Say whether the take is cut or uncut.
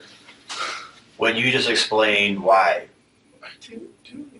uncut